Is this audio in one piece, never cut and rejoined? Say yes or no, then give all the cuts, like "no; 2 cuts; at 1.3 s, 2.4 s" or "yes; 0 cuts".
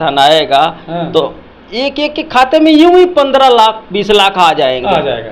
yes; 0 cuts